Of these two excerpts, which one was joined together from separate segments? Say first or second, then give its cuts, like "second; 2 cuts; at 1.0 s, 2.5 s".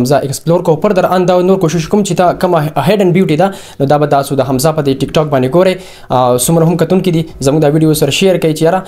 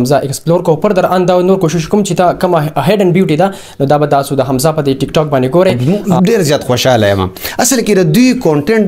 second; 1 cut; at 5.8 s